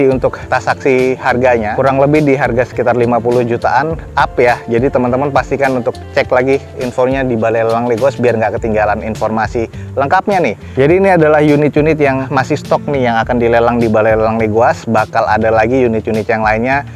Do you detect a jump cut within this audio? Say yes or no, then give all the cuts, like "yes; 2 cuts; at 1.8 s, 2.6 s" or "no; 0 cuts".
no; 0 cuts